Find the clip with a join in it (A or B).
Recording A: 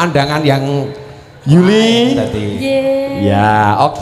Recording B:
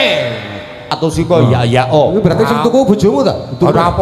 B